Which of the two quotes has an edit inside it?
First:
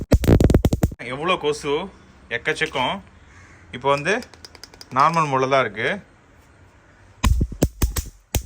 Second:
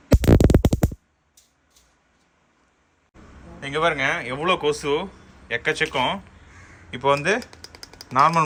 first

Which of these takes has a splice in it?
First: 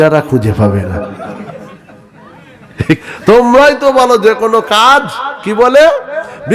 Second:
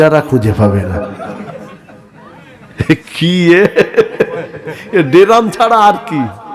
first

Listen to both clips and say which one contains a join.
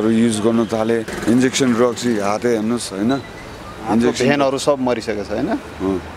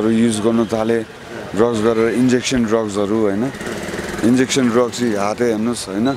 first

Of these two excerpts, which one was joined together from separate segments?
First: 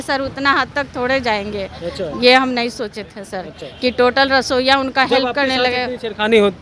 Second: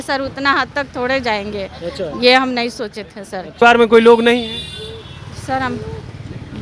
second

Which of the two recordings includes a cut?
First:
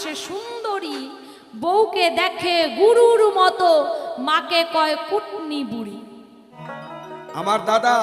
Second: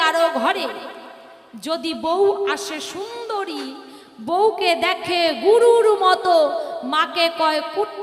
first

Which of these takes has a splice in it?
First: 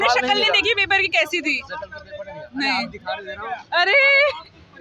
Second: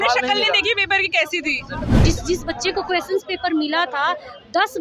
second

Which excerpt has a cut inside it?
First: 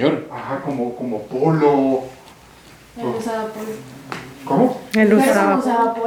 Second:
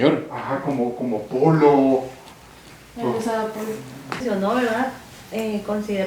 second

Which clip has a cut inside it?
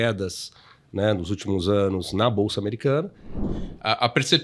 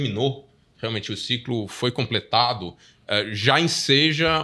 first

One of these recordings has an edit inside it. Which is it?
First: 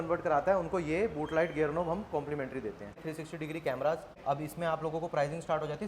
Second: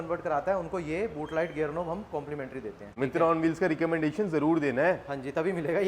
first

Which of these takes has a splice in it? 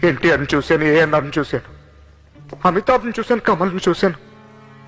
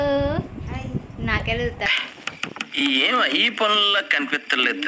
second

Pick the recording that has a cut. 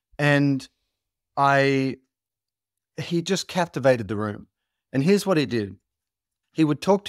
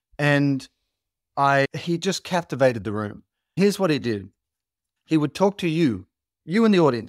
second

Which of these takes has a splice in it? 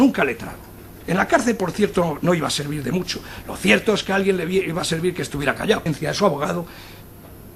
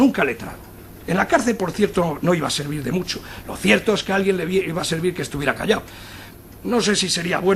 second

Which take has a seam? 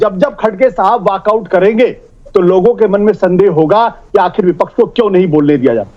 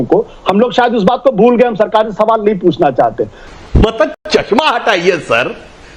second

